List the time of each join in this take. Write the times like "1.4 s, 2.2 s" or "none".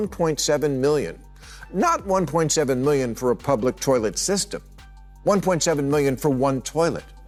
none